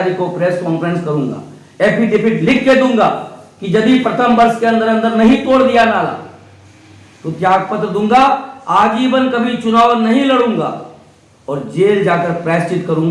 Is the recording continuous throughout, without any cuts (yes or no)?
yes